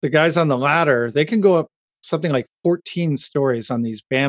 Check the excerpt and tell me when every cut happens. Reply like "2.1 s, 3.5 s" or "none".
none